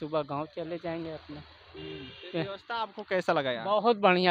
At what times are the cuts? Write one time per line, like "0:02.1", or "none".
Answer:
none